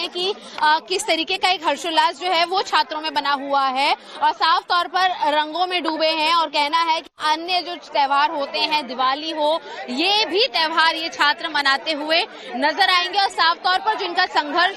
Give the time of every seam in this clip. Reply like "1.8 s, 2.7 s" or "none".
1.0 s